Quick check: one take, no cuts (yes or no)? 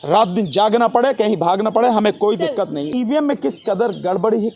no